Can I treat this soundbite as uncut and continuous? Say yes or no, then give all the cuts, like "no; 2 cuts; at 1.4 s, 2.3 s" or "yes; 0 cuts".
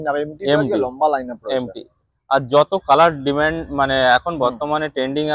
yes; 0 cuts